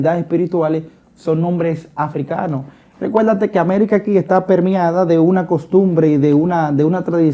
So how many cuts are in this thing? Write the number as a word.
zero